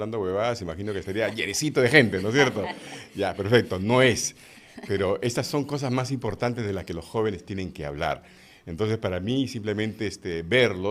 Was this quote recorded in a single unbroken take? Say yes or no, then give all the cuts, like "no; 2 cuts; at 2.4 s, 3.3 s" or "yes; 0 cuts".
yes; 0 cuts